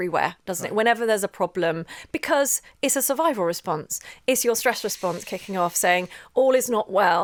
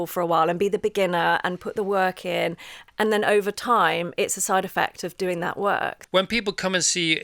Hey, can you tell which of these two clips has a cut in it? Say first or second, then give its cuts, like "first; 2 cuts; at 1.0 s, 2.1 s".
second; 2 cuts; at 2.8 s, 6.0 s